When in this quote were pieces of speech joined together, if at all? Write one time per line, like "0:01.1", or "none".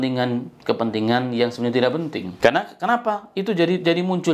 0:02.3